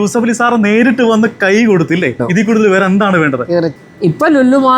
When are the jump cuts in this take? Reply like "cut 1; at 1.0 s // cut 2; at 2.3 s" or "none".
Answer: cut 1; at 2.3 s // cut 2; at 3.8 s